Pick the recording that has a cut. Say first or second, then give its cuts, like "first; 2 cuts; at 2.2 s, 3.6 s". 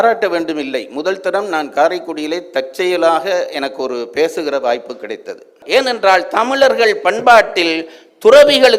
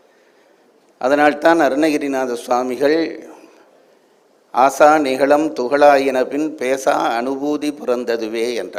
first; 1 cut; at 5.6 s